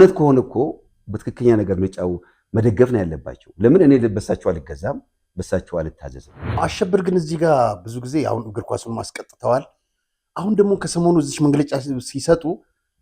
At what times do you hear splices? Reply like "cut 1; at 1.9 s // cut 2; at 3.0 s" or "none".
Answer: cut 1; at 6.6 s